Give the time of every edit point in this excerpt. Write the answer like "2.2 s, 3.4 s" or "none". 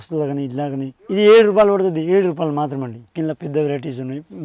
1.0 s, 3.1 s